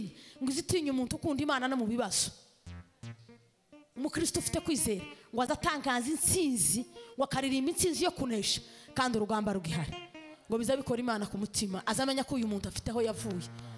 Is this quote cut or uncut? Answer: uncut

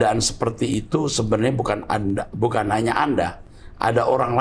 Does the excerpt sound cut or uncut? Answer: uncut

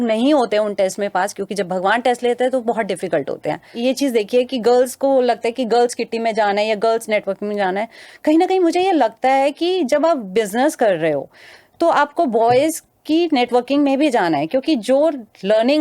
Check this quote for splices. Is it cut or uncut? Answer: cut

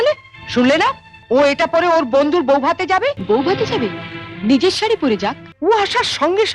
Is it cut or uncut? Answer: cut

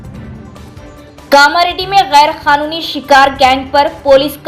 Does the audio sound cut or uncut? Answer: cut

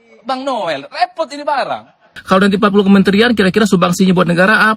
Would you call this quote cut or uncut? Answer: cut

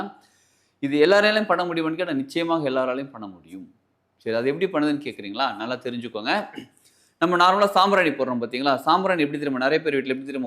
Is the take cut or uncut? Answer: uncut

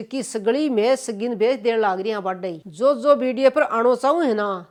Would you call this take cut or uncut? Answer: uncut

